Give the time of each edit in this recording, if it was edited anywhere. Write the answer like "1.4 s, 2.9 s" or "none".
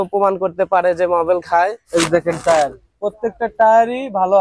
1.8 s